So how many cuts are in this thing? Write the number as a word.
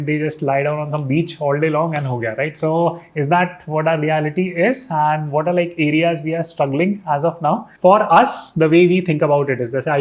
one